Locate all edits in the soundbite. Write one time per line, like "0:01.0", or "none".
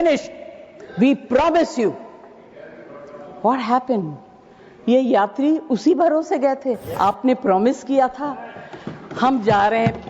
0:06.9